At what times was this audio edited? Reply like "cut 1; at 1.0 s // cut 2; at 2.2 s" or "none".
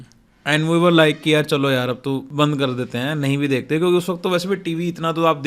cut 1; at 2.3 s